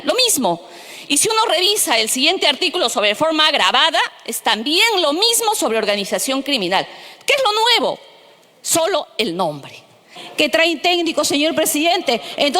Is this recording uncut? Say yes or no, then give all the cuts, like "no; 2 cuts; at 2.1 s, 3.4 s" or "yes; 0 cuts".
no; 1 cut; at 10.2 s